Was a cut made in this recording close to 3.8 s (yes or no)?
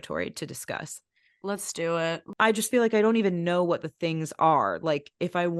no